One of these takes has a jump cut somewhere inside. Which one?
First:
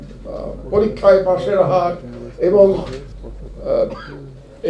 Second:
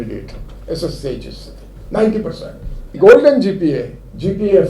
second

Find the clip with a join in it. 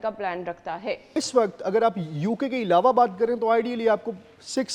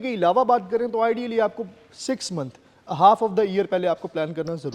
first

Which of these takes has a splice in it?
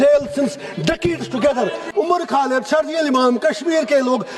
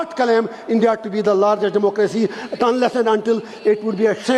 first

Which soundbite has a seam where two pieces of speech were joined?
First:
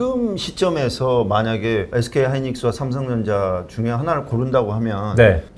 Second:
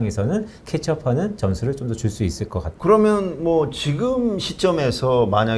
second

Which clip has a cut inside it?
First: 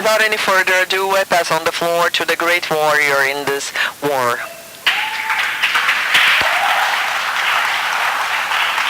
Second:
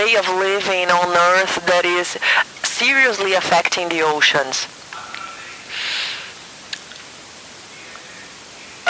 first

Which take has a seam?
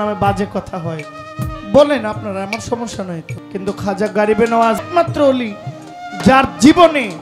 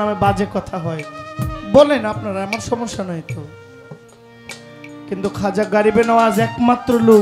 first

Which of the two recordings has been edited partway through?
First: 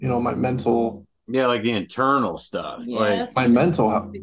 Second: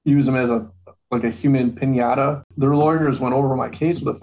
second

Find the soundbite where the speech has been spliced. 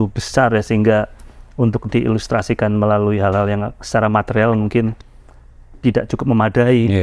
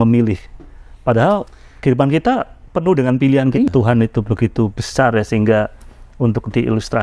second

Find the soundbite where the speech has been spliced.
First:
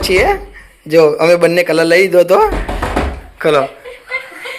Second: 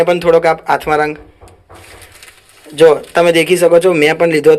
first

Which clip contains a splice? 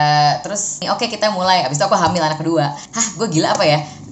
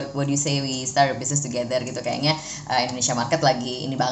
first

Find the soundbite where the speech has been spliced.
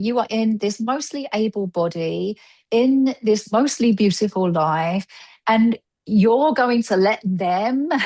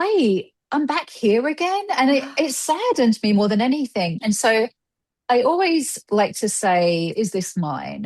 second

